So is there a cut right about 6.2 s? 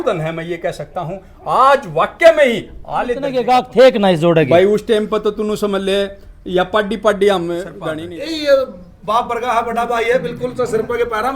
no; 2 cuts; at 3.4 s, 7.7 s

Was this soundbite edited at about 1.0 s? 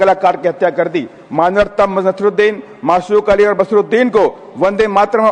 no; 0 cuts

